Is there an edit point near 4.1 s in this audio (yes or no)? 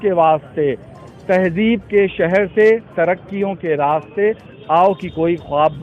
no